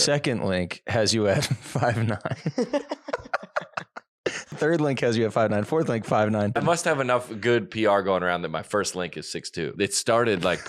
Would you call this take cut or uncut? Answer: cut